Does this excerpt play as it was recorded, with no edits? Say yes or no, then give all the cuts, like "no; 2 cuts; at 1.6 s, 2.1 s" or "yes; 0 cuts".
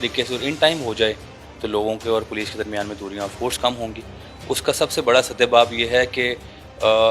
yes; 0 cuts